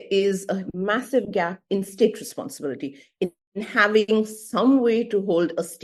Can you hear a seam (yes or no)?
no